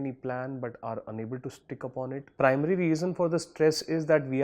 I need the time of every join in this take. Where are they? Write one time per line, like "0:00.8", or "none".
0:02.2